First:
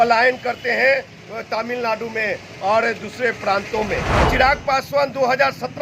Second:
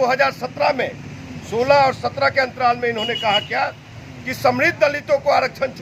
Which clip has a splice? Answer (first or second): first